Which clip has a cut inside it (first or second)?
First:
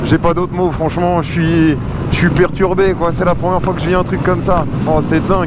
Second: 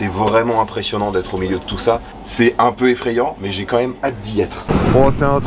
second